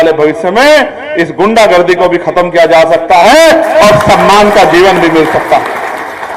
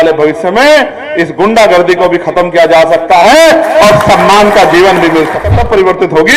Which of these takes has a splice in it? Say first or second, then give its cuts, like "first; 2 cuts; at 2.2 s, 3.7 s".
second; 1 cut; at 5.4 s